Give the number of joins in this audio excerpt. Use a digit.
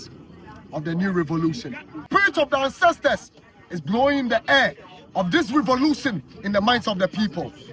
1